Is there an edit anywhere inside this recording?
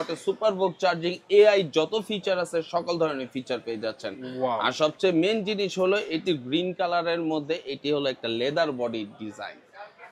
no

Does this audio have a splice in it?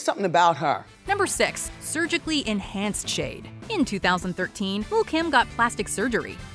no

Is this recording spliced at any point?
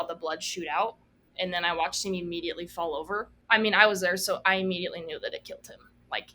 yes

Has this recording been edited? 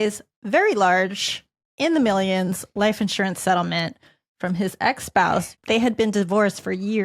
yes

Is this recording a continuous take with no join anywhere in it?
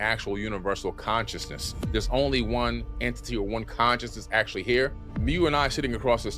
no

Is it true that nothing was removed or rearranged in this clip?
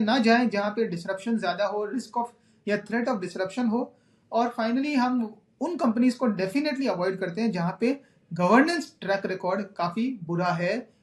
yes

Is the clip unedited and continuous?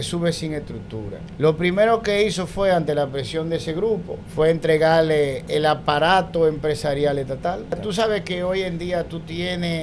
no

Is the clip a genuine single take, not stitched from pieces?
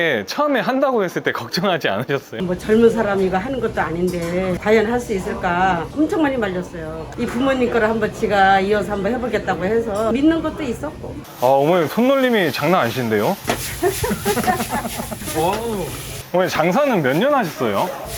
no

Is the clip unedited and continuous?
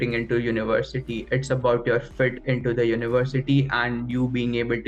yes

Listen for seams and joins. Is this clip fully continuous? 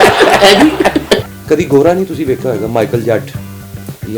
no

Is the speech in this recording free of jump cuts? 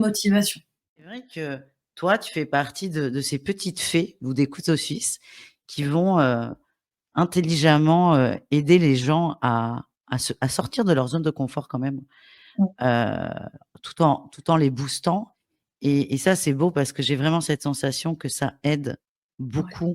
no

